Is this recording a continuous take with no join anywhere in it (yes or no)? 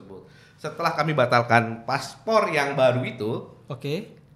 yes